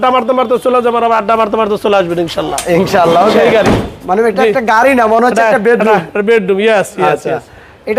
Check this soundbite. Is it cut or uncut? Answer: uncut